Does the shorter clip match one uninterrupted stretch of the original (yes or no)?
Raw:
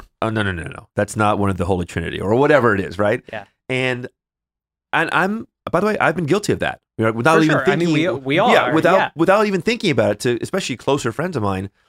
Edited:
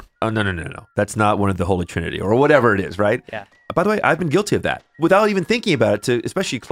no